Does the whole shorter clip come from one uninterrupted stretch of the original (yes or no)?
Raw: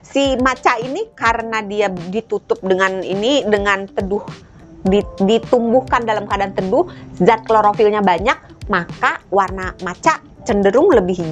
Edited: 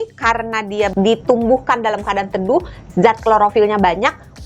no